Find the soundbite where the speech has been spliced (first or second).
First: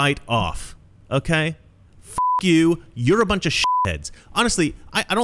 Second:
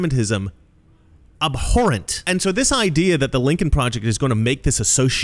second